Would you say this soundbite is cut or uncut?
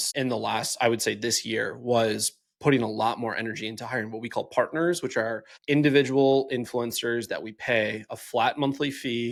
uncut